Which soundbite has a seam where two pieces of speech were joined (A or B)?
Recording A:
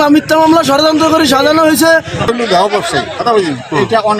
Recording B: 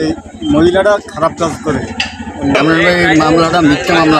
A